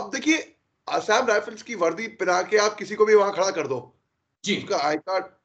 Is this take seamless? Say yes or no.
yes